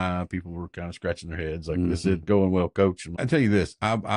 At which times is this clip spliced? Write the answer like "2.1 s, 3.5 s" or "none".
3.2 s